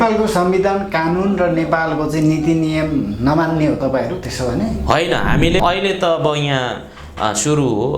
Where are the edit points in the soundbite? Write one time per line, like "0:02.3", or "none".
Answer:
0:05.6